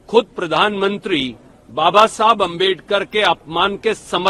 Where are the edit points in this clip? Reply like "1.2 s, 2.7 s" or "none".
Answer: none